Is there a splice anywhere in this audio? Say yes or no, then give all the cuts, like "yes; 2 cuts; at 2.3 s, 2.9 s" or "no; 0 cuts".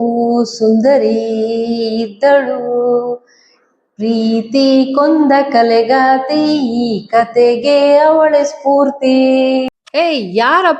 yes; 1 cut; at 9.8 s